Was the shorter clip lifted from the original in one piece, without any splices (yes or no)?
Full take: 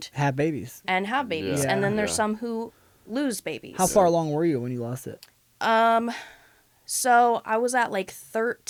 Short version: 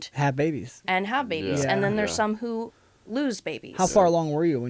yes